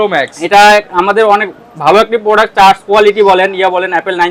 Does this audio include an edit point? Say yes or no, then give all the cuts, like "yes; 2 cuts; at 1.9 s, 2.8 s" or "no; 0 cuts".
no; 0 cuts